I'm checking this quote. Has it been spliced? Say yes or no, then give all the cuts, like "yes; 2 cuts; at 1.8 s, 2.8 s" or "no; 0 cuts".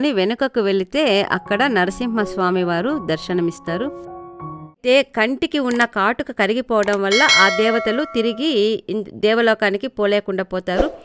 yes; 1 cut; at 4.8 s